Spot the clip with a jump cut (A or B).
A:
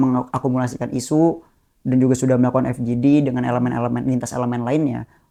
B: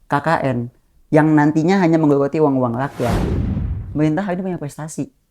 B